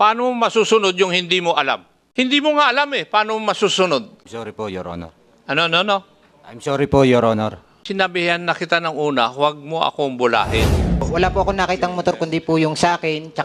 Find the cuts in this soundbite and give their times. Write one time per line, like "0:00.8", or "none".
0:02.0
0:04.2
0:07.7
0:11.1